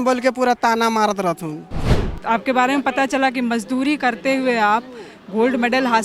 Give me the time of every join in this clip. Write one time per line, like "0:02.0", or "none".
0:02.0